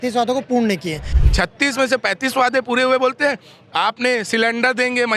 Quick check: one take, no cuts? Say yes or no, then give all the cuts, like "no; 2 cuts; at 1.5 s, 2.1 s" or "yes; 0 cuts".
no; 1 cut; at 1.1 s